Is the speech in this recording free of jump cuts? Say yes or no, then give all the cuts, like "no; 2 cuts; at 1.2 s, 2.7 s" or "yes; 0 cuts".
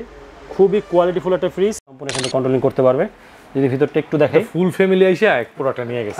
no; 1 cut; at 1.9 s